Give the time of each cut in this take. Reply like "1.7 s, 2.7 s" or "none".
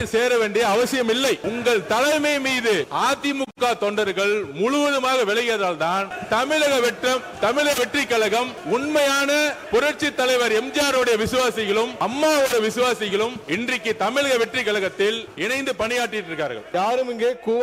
1.4 s, 2.9 s, 6.1 s, 8.6 s, 9.6 s, 11.9 s, 13.4 s, 15.3 s, 16.6 s